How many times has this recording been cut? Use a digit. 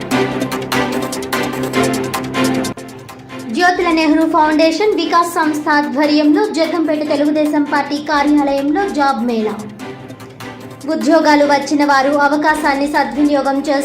1